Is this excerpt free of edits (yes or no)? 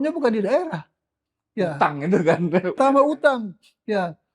no